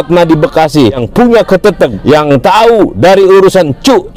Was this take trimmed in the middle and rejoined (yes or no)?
yes